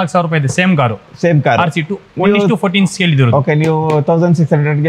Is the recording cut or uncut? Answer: uncut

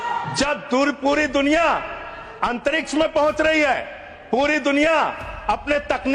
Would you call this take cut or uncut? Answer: uncut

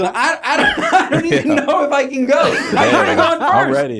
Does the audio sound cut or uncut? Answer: uncut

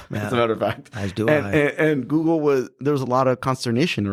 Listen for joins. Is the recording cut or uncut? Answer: uncut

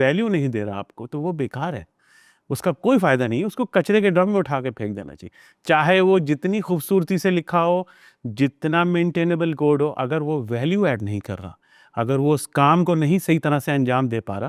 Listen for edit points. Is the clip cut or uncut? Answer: uncut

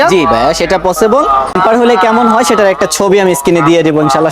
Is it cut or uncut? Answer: cut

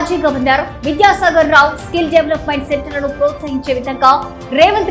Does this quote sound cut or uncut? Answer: uncut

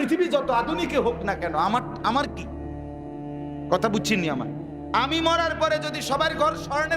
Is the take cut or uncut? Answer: cut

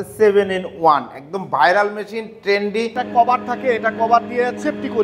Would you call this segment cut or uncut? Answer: cut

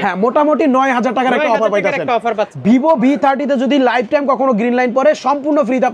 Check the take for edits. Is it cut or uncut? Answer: cut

